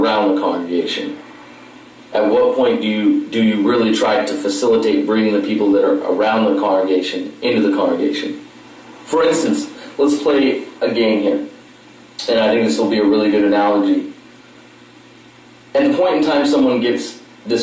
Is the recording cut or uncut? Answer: uncut